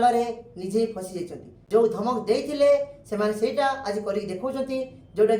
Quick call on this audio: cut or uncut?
cut